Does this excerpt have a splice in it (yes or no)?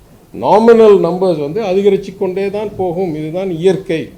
no